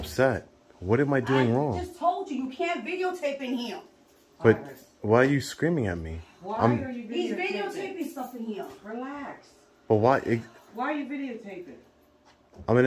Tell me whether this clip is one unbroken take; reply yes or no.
yes